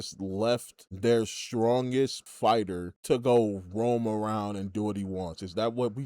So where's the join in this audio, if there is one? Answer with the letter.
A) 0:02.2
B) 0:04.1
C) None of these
A